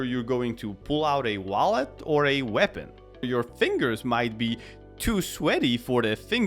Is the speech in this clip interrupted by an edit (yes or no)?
yes